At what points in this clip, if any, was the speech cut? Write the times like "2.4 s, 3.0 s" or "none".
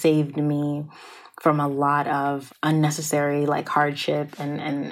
2.5 s